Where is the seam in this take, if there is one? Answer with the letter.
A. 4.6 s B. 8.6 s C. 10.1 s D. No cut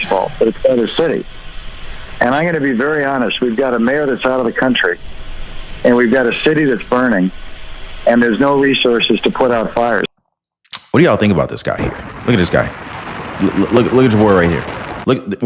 C